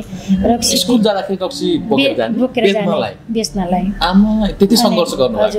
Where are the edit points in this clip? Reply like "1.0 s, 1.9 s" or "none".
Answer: none